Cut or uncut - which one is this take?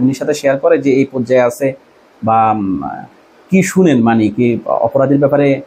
uncut